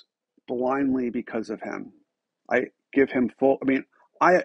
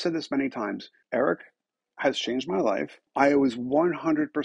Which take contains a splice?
second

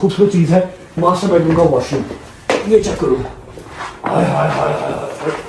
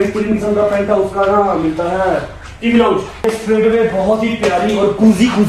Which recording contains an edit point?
second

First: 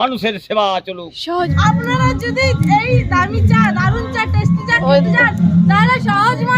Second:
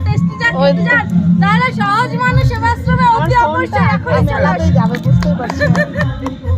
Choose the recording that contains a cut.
first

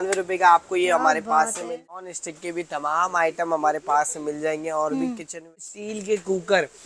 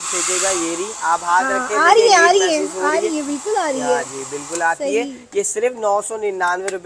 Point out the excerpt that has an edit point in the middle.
first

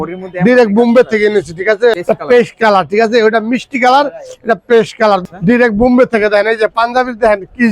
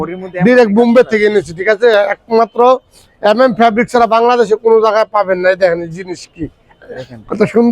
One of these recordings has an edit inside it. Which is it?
first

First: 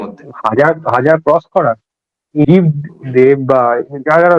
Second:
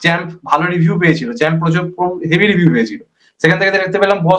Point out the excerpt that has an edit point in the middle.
first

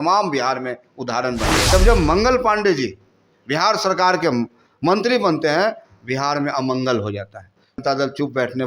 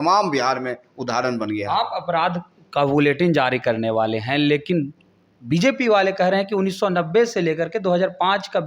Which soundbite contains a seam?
first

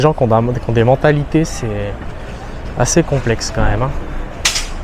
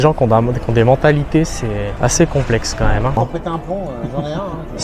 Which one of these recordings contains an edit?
second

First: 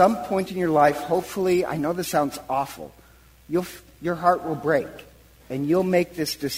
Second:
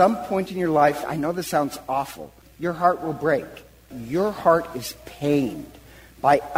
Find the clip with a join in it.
second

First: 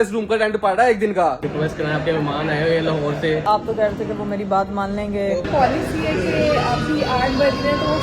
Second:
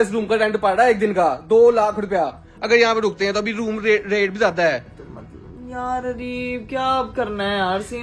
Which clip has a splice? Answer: first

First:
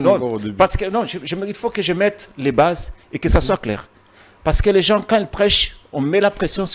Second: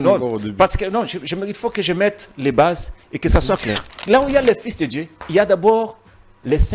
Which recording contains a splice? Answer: second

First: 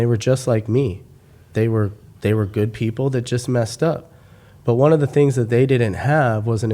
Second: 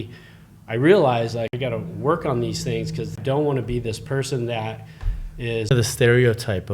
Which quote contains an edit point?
second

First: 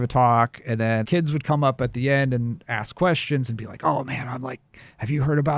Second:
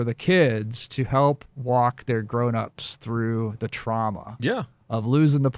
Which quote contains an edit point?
first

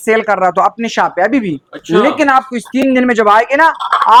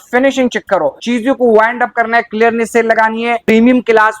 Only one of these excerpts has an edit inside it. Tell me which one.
second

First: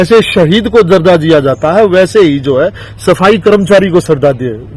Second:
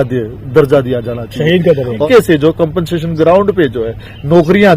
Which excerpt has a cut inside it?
second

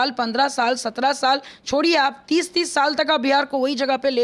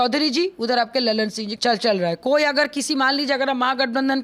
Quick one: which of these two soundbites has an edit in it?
second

